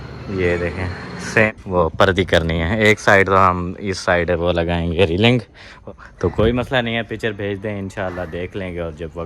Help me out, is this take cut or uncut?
cut